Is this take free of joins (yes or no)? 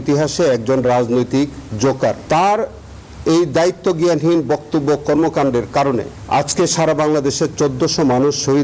yes